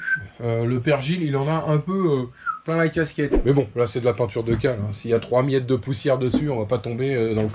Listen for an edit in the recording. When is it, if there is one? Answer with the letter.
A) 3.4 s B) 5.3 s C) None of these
A